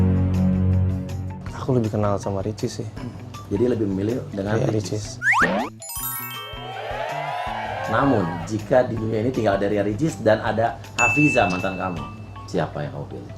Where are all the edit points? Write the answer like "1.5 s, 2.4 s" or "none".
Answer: none